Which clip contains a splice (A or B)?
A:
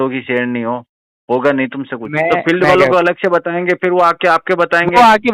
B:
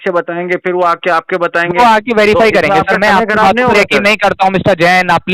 A